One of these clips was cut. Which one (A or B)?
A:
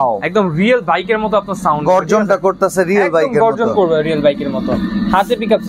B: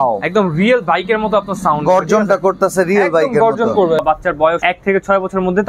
B